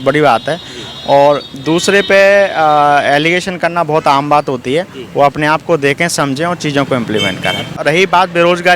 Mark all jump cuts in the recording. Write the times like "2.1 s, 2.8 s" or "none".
7.8 s